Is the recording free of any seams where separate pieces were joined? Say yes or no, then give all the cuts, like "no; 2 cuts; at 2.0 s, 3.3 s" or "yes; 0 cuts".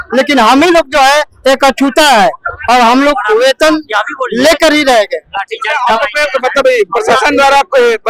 yes; 0 cuts